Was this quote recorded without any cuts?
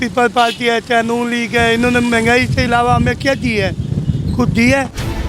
yes; 0 cuts

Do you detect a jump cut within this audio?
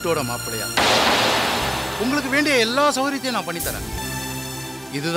no; 0 cuts

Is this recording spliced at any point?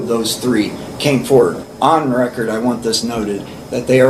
yes; 1 cut; at 1.6 s

